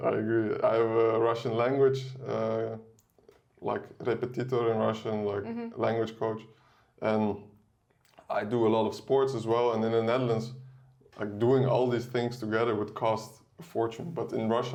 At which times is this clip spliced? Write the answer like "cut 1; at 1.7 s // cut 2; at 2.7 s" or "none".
none